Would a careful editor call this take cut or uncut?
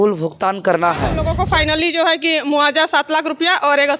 cut